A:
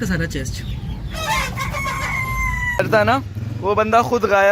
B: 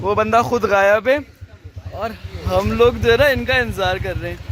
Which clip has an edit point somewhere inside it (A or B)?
A